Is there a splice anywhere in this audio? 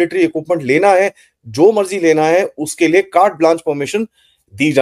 no; 0 cuts

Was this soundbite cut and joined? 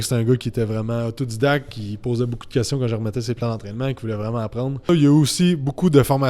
yes; 1 cut; at 4.9 s

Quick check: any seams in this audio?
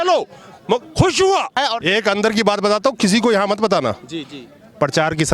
yes; 1 cut; at 1.5 s

